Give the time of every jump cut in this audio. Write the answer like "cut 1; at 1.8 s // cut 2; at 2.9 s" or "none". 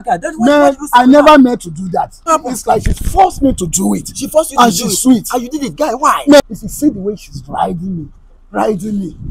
cut 1; at 2.3 s // cut 2; at 6.4 s